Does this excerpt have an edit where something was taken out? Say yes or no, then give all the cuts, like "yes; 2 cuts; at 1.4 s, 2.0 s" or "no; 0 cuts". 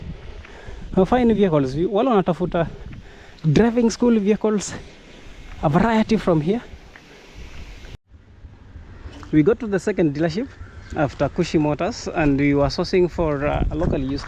yes; 1 cut; at 8.1 s